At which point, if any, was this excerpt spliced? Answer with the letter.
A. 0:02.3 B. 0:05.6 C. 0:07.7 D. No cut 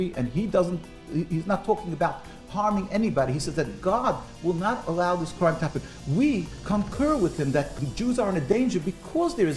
C